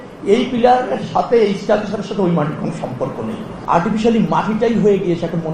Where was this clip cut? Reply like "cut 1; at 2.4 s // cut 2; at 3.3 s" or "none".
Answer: cut 1; at 3.5 s